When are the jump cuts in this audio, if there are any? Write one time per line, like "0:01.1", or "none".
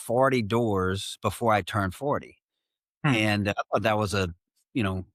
none